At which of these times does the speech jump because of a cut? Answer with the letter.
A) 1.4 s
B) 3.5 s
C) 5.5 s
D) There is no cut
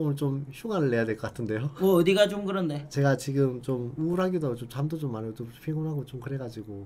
D